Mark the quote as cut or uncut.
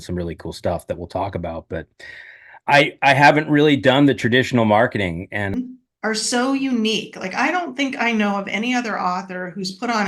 cut